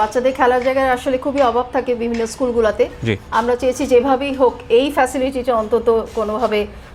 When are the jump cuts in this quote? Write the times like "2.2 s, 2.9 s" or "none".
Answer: none